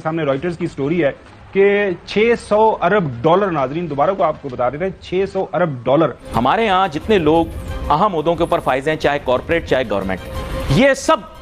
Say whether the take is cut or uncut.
cut